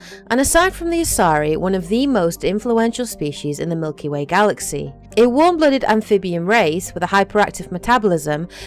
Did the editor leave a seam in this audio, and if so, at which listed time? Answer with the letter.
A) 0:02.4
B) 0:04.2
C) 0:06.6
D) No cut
A